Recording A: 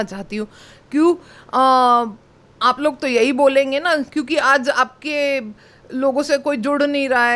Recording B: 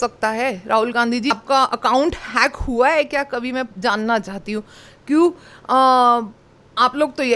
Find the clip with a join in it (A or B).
B